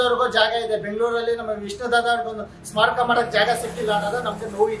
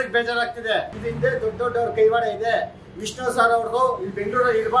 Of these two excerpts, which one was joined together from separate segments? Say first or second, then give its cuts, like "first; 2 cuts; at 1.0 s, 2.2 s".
second; 1 cut; at 1.0 s